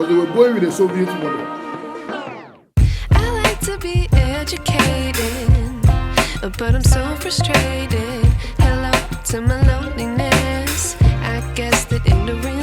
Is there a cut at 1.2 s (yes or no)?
yes